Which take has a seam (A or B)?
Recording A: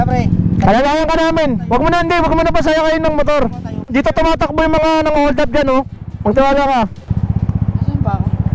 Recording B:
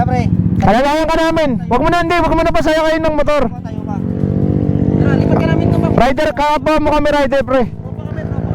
A